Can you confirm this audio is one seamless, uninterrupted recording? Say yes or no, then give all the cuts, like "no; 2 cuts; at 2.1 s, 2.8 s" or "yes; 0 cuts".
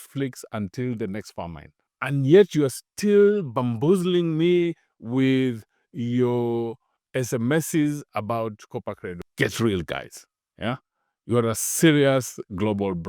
no; 1 cut; at 9.2 s